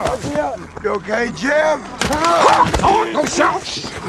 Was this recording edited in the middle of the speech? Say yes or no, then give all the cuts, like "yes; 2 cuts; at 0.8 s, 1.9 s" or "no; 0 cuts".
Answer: yes; 1 cut; at 1.9 s